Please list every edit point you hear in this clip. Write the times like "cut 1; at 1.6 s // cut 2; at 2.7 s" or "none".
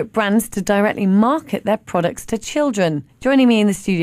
cut 1; at 3.1 s